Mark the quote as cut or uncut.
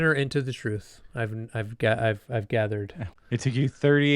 cut